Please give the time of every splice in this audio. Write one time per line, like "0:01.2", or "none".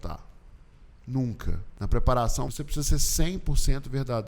0:01.7
0:02.5

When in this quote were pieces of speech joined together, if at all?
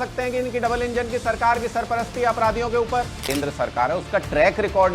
0:03.2

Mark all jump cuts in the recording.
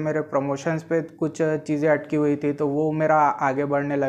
none

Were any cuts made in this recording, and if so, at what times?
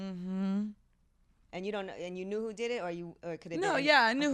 none

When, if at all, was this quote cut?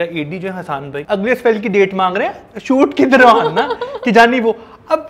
0:01.0

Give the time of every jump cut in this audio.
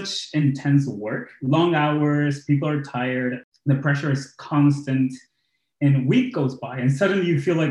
0:03.5

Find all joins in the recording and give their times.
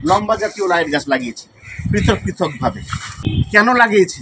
0:03.3

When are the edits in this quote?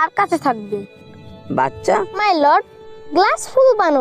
0:02.1

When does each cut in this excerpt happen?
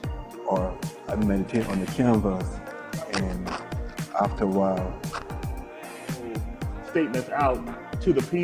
0:06.5

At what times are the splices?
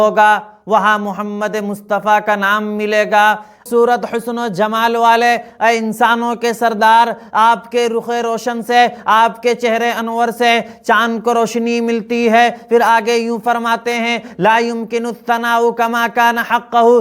0:03.6

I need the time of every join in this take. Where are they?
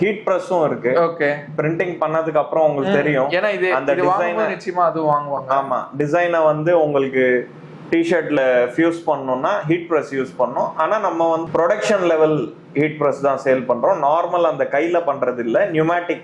none

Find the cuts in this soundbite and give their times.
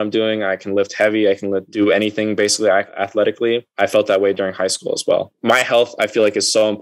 0:01.7
0:02.9
0:05.3

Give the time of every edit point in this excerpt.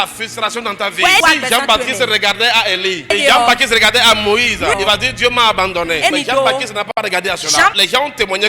0:01.2
0:03.1
0:04.8
0:06.1
0:07.7

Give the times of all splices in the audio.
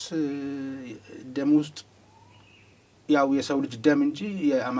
none

